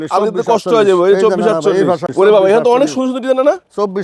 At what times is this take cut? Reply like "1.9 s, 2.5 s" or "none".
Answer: 2.1 s